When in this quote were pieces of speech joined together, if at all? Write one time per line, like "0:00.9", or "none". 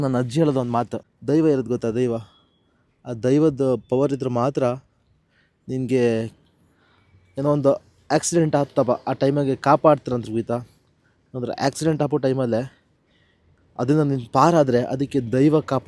0:01.1